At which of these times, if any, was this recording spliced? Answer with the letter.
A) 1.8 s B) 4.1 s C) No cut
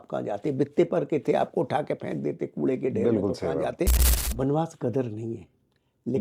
B